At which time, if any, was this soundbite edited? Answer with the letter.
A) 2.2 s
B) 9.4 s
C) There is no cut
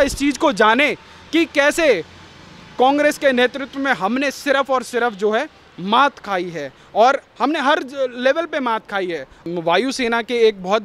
B